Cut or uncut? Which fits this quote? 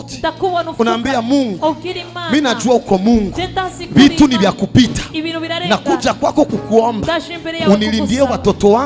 uncut